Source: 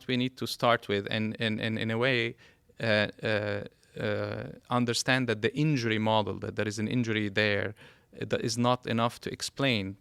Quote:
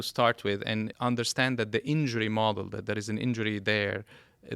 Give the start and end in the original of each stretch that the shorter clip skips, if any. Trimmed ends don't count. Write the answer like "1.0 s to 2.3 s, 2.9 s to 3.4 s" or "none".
1.4 s to 4.6 s